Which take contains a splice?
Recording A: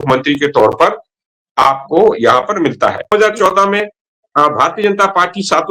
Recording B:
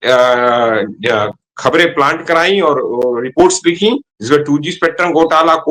A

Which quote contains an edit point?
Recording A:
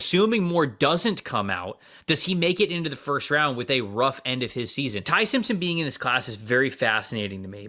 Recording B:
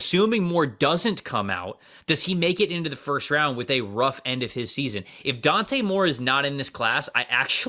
A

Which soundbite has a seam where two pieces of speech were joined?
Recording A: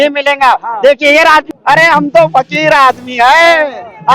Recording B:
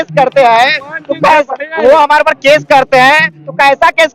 A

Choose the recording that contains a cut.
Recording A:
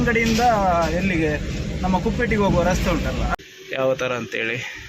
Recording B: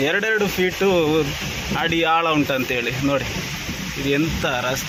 A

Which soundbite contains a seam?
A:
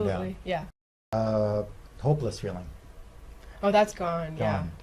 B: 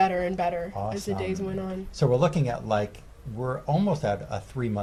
A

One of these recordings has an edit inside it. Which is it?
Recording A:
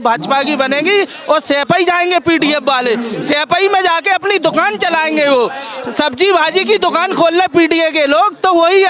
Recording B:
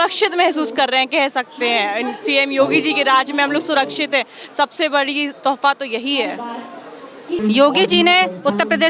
B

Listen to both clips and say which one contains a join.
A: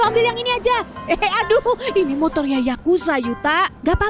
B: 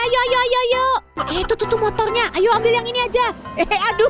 B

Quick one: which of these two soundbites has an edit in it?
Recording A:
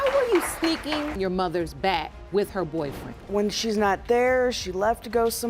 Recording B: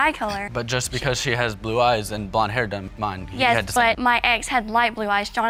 A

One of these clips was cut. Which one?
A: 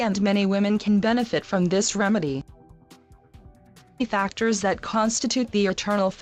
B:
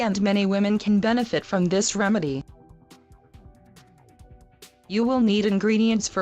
B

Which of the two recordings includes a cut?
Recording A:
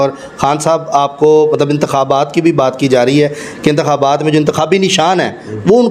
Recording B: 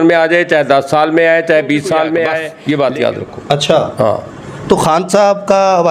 B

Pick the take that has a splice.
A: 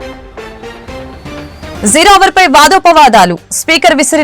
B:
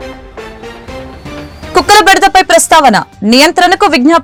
A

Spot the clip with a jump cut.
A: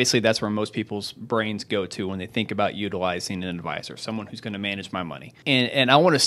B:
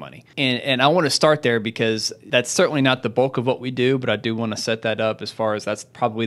B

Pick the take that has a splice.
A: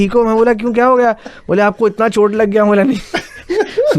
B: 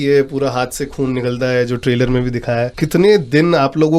B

